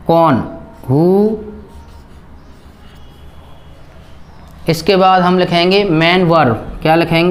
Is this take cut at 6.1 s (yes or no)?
no